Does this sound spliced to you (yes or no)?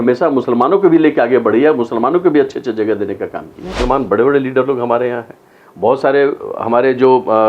yes